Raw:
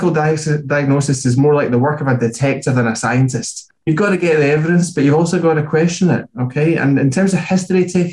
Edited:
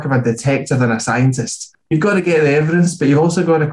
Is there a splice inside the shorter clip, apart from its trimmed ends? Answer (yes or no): no